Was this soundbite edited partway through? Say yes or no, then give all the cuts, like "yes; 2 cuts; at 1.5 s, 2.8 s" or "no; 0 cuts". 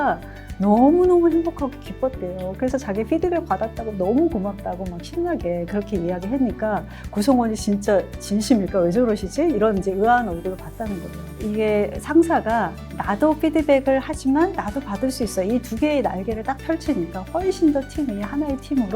yes; 1 cut; at 11.2 s